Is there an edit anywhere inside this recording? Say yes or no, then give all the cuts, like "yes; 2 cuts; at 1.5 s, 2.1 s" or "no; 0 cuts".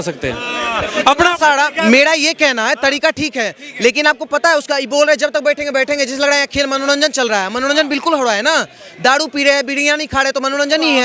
no; 0 cuts